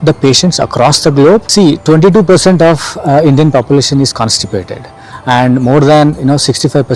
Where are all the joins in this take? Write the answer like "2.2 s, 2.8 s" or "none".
1.5 s